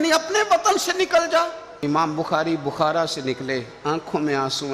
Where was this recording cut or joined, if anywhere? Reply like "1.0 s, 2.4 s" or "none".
1.7 s